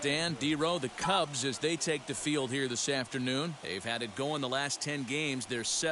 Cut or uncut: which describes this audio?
uncut